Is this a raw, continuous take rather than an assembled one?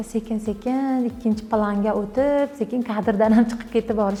yes; 0 cuts

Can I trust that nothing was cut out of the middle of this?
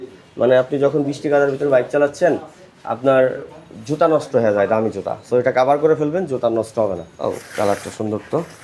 no; 1 cut; at 7.1 s

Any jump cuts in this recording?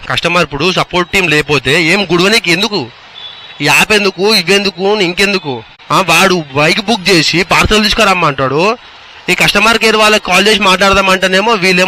yes; 1 cut; at 5.7 s

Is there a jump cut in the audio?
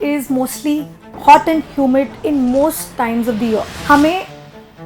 yes; 2 cuts; at 2.1 s, 3.7 s

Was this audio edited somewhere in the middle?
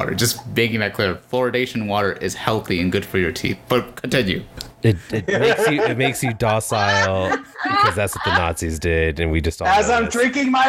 no; 0 cuts

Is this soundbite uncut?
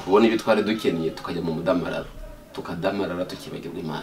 yes; 0 cuts

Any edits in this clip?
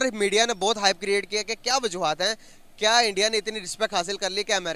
no; 0 cuts

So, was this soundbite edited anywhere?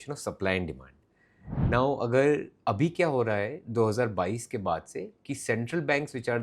no; 0 cuts

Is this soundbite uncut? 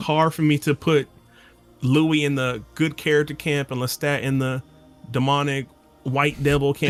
yes; 0 cuts

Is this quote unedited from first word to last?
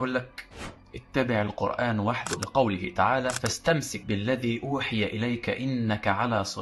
yes; 0 cuts

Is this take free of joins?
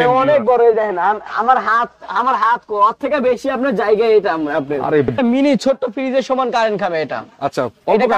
no; 1 cut; at 5.1 s

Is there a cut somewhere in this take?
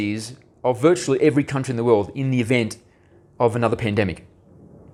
no; 0 cuts

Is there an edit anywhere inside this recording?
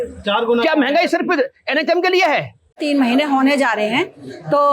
yes; 1 cut; at 2.7 s

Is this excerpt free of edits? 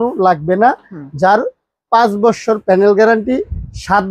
yes; 0 cuts

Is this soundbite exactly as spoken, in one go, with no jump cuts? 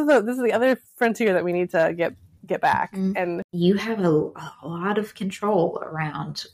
no; 1 cut; at 3.5 s

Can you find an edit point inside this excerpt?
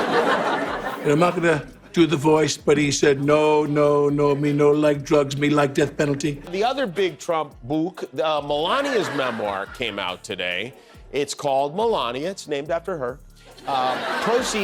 yes; 1 cut; at 6.5 s

